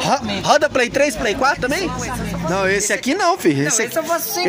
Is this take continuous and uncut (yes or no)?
no